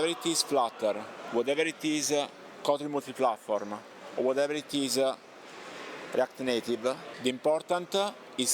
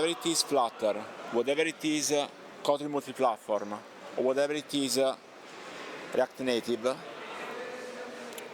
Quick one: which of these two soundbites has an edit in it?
first; 1 cut; at 7.1 s

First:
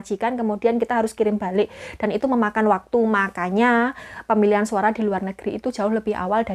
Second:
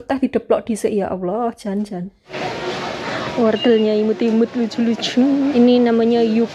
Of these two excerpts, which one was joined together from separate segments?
second; 2 cuts; at 2.3 s, 5.5 s

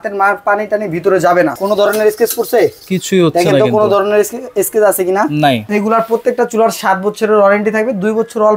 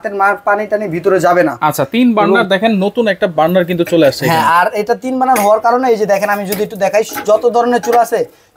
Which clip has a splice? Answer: first; 2 cuts; at 1.5 s, 5.6 s

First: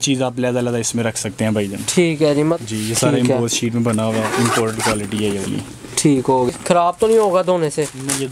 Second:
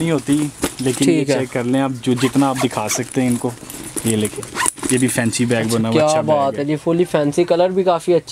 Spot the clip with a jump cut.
first; 2 cuts; at 2.6 s, 6.5 s

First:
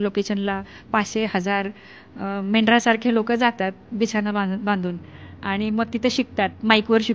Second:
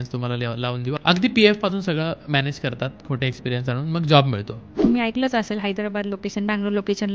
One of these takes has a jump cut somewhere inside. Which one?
second; 2 cuts; at 1.0 s, 4.8 s

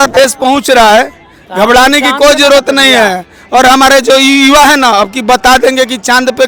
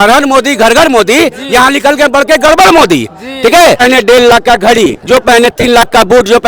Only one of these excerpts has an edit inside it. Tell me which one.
second; 1 cut; at 3.8 s

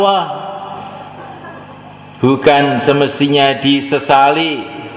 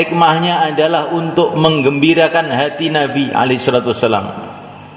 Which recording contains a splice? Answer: first; 1 cut; at 1.9 s

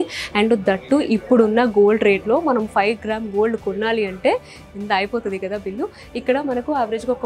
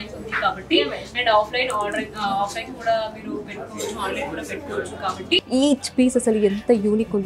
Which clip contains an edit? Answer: second; 1 cut; at 5.4 s

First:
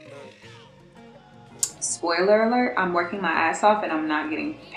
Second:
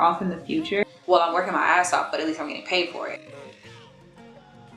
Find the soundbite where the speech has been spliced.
second; 1 cut; at 1.0 s

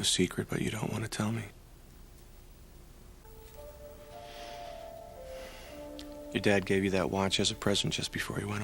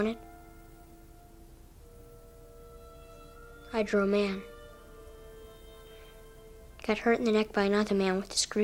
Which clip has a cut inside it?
first; 1 cut; at 3.2 s

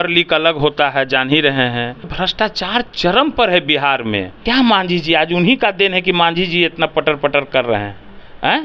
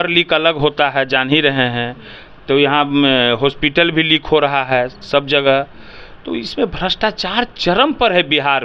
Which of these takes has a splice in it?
first; 2 cuts; at 2.1 s, 4.3 s

